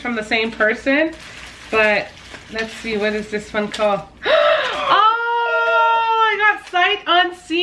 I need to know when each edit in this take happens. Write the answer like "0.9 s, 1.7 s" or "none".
none